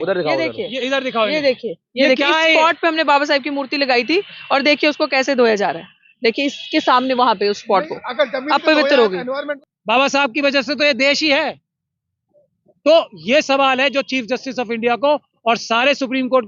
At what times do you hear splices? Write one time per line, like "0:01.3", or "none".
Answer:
0:09.6